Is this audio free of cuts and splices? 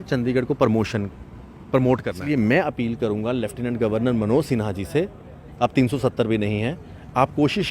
no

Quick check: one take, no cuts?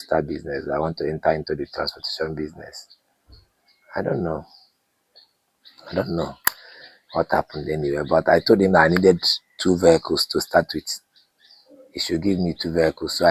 yes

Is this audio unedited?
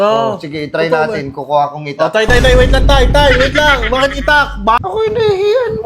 no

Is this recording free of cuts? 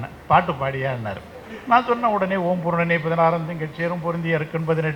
yes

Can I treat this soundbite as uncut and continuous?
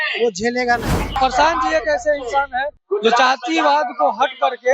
no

